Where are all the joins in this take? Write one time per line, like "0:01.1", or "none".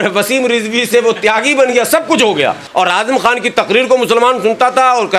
0:02.6